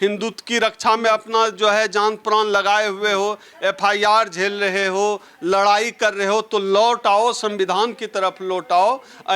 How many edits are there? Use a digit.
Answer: 0